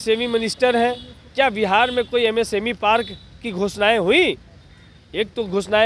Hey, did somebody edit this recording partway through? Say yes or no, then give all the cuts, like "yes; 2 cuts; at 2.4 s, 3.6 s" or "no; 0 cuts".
no; 0 cuts